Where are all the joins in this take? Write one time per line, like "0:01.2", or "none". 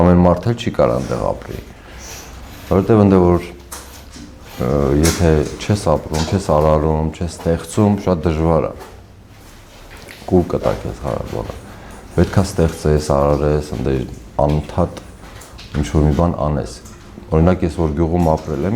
none